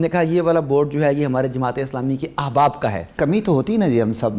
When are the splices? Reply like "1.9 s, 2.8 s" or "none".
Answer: 3.1 s